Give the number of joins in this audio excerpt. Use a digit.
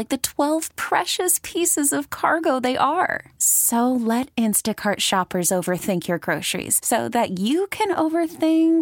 0